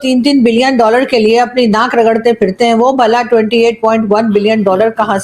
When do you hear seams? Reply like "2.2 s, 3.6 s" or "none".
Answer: none